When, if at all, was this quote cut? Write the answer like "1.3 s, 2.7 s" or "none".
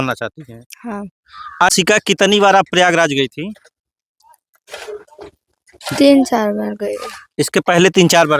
1.7 s